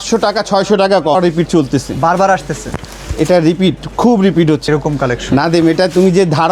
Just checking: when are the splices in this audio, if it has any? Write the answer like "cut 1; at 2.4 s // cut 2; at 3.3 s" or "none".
cut 1; at 1.1 s // cut 2; at 4.6 s